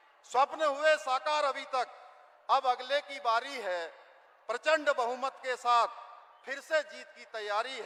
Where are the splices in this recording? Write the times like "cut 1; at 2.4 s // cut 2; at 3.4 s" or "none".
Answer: none